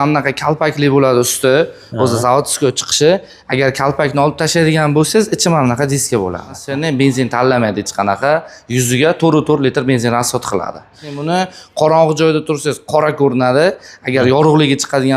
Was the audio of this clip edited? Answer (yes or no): yes